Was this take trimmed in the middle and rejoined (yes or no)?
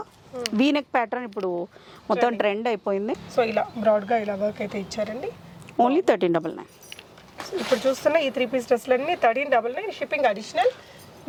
no